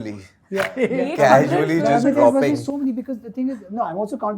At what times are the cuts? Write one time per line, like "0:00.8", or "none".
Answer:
none